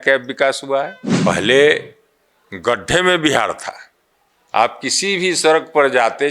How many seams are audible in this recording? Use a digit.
1